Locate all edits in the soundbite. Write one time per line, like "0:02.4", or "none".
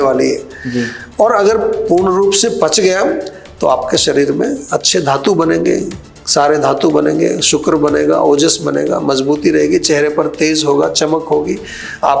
none